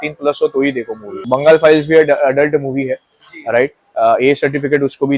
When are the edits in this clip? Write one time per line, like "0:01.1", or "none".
0:01.2